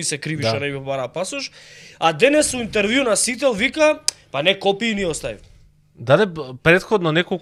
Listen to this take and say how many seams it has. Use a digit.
0